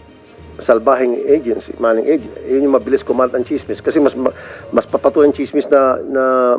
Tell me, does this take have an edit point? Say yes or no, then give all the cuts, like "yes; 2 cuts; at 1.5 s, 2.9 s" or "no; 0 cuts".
yes; 1 cut; at 2.3 s